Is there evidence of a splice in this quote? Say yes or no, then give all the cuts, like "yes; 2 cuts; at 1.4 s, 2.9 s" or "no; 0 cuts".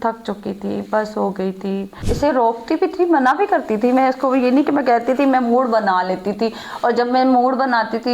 yes; 1 cut; at 2.0 s